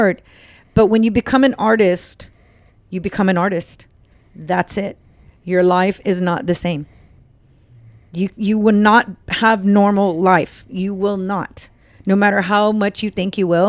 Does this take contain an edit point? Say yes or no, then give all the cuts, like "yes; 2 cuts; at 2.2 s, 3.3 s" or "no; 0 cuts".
no; 0 cuts